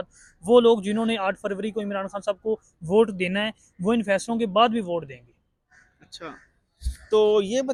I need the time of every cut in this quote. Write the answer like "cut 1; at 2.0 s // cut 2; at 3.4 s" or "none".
none